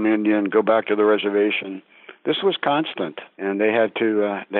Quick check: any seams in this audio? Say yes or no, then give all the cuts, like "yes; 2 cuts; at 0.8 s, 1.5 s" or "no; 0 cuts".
yes; 1 cut; at 3.2 s